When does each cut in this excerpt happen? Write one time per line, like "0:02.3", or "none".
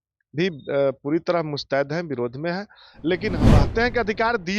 0:03.4